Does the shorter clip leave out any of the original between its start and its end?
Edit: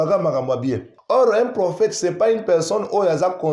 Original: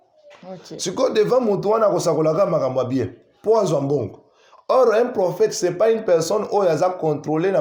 yes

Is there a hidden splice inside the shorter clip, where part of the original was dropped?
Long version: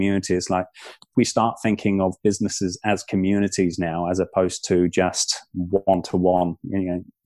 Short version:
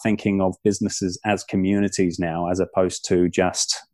no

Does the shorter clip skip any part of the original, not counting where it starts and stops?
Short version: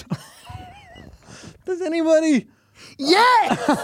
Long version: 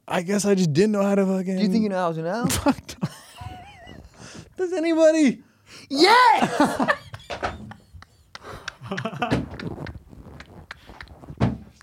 no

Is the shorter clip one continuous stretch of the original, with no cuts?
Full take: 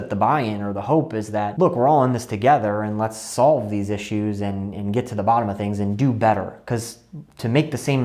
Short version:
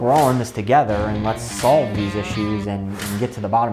yes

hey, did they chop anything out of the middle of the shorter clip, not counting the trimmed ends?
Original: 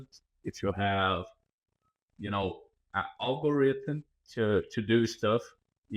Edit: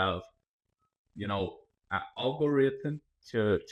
no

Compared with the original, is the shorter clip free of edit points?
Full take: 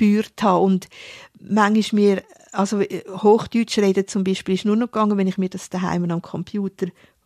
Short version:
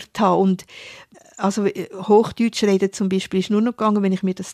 no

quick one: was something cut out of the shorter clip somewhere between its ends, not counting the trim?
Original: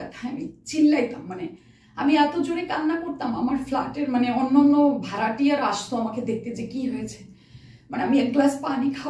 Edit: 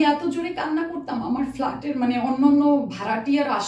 no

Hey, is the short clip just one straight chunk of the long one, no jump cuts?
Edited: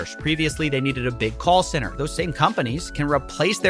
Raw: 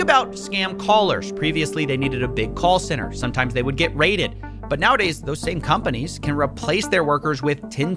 no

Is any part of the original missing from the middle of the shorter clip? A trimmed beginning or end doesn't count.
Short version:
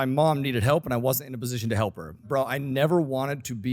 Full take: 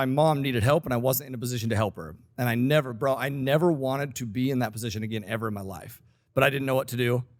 yes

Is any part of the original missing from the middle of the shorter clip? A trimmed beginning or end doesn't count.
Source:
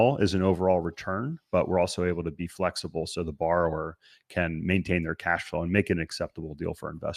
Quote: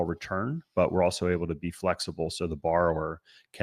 no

